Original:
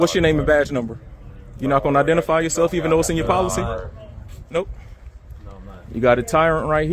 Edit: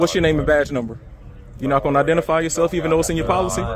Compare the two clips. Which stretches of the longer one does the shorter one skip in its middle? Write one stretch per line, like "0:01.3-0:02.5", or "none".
none